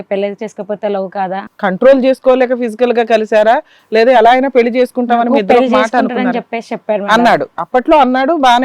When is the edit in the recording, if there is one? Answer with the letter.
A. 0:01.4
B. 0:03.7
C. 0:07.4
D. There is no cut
A